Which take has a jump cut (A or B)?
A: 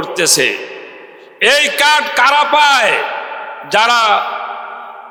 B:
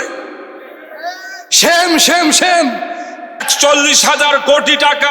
B